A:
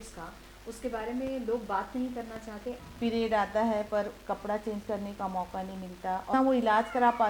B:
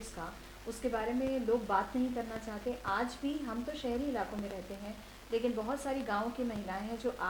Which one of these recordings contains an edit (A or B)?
A